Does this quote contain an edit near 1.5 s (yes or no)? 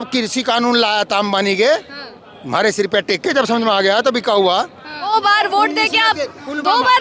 no